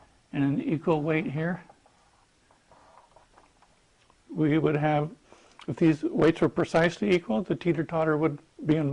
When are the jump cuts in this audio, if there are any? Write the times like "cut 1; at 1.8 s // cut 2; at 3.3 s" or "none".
cut 1; at 4.8 s